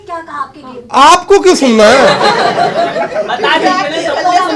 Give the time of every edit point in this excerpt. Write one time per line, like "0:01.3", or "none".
none